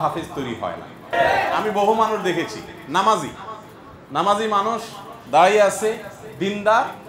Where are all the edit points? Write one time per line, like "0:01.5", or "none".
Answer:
0:01.1

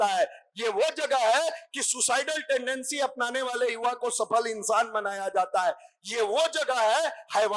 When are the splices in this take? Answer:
none

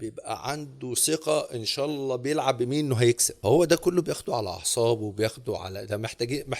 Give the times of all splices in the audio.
0:03.3

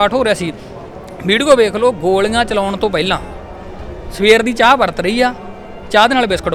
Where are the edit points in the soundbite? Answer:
none

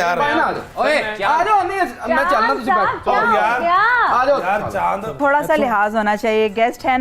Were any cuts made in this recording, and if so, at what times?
0:05.2

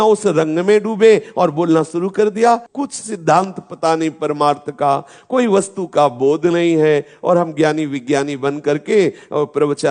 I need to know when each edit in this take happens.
0:02.7

